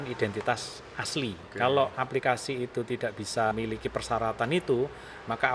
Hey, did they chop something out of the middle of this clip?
yes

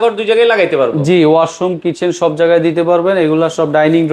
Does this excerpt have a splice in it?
no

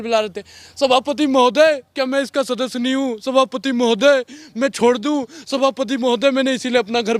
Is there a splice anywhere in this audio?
no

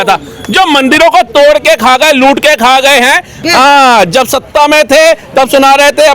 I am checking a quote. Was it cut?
yes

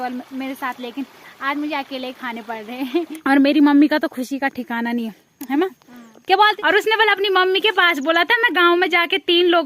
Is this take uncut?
no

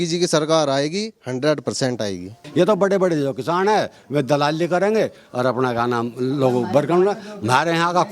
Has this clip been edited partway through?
yes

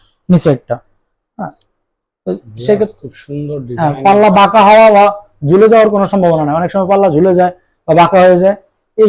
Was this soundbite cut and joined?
no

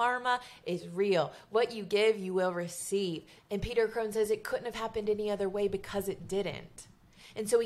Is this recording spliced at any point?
yes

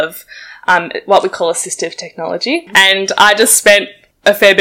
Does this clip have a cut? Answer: yes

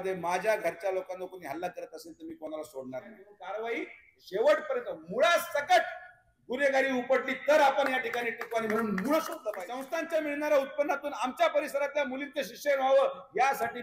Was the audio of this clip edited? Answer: yes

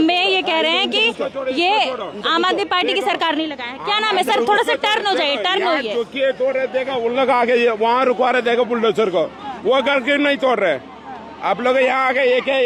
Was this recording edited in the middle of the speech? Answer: no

